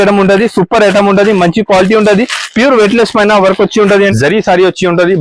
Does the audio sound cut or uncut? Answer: cut